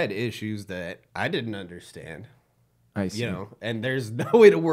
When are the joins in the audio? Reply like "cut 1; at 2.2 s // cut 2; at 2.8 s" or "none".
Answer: none